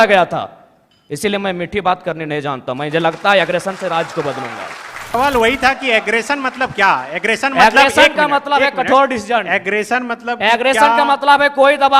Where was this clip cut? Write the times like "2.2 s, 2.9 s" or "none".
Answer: 5.1 s